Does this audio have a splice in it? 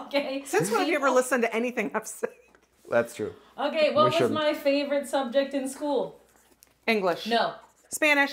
no; 0 cuts

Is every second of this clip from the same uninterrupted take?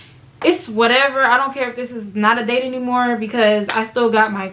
yes; 0 cuts

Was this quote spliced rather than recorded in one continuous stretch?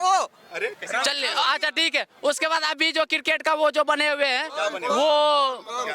no; 0 cuts

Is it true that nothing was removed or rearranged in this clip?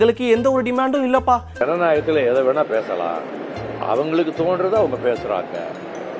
no; 1 cut; at 1.6 s

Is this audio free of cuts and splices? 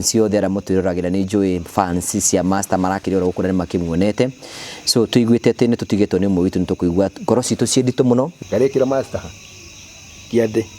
no; 1 cut; at 8.4 s

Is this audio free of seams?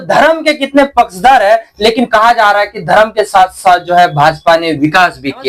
yes; 0 cuts

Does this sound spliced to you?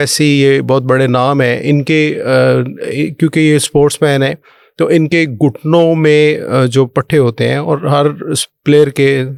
no; 0 cuts

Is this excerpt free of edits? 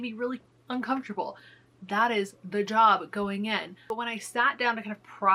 yes; 0 cuts

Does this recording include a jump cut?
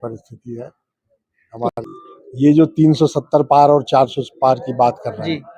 yes; 1 cut; at 1.7 s

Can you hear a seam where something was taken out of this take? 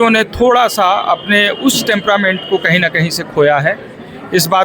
no; 0 cuts

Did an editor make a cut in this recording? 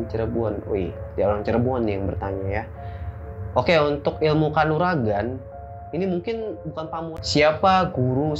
yes; 1 cut; at 7.1 s

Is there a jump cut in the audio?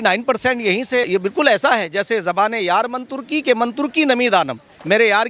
yes; 1 cut; at 1.1 s

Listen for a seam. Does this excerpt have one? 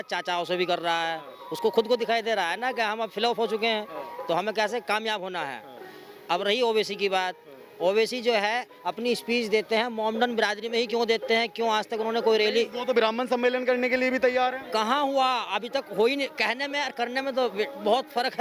no; 0 cuts

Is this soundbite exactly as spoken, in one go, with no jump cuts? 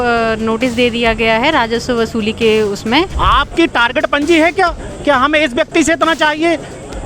no; 1 cut; at 3.1 s

